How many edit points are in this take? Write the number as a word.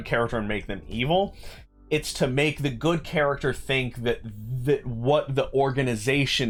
zero